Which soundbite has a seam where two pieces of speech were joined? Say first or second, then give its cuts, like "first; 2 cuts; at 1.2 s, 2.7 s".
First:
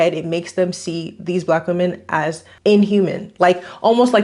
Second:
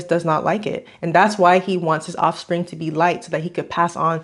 first; 1 cut; at 2.5 s